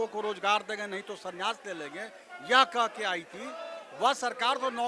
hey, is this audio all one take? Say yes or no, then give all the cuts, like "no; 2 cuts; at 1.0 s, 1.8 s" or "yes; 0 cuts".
yes; 0 cuts